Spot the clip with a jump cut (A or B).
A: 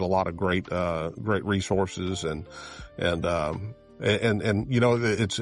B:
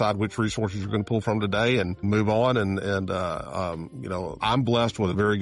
B